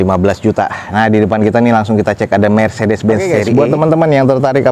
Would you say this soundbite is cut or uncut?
cut